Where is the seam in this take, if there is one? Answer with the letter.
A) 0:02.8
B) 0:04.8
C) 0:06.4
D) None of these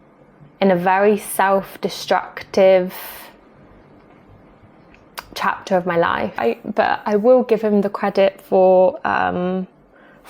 C